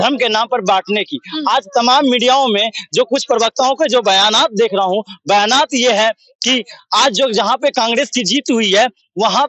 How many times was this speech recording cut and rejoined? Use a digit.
0